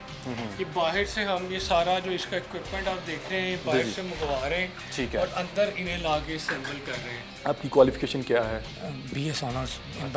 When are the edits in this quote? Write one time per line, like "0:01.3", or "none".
0:07.3